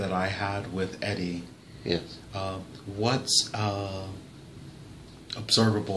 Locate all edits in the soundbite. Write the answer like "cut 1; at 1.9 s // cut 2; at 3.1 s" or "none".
none